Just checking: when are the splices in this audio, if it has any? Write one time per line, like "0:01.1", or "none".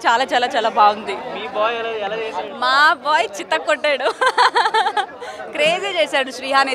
none